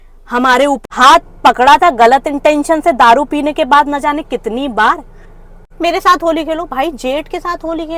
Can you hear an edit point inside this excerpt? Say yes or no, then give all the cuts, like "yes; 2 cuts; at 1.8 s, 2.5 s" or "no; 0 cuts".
yes; 2 cuts; at 0.9 s, 5.7 s